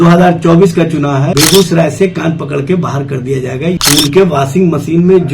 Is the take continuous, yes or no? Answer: no